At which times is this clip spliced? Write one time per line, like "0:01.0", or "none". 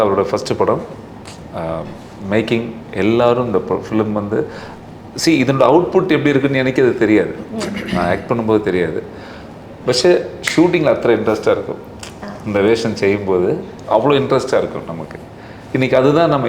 none